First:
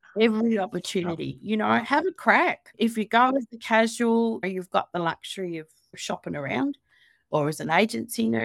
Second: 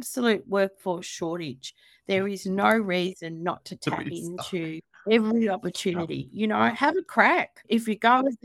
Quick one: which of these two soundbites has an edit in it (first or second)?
first